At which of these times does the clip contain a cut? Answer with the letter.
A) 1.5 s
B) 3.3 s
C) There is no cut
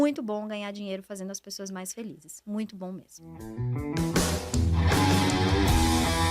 B